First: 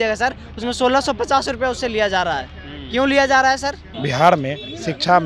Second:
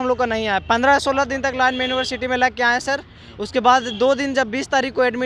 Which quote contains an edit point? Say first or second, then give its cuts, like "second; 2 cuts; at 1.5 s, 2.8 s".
first; 1 cut; at 3.9 s